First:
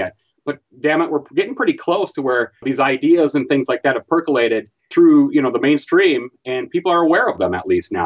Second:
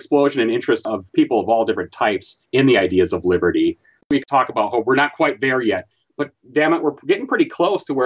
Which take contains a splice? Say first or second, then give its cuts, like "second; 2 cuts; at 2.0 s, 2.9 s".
second; 3 cuts; at 0.8 s, 2.3 s, 4.1 s